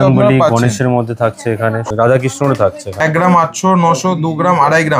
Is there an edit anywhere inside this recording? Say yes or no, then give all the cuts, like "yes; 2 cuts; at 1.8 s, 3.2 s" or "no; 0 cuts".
yes; 2 cuts; at 1.8 s, 3.0 s